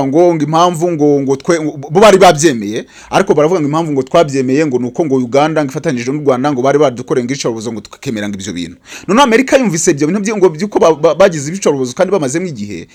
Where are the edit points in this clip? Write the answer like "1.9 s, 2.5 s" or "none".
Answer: none